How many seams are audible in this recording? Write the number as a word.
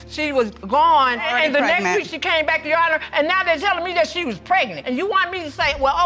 two